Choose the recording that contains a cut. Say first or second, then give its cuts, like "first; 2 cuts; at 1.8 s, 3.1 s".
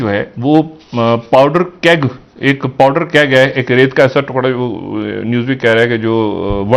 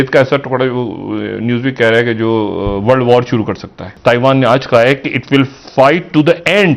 second; 1 cut; at 3.9 s